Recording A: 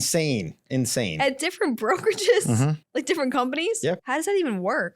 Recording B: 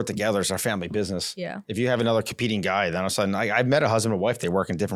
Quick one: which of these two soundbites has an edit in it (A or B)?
A